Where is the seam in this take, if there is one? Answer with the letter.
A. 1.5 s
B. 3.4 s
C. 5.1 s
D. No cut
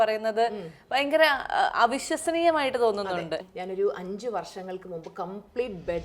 B